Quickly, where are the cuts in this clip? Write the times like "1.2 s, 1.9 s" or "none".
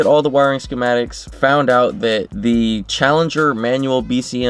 1.2 s

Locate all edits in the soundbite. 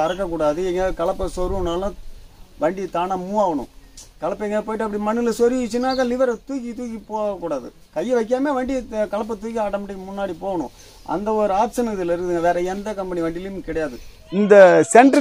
none

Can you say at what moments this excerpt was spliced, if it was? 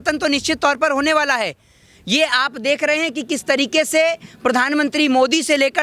none

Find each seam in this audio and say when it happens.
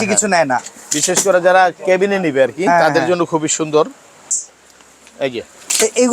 4.3 s

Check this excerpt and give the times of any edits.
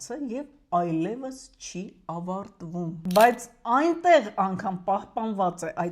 2.9 s

